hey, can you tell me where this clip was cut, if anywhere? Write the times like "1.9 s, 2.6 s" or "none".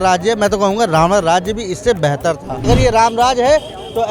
2.7 s